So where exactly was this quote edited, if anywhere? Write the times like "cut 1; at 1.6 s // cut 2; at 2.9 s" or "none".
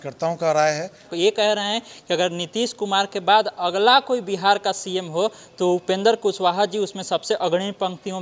cut 1; at 1.1 s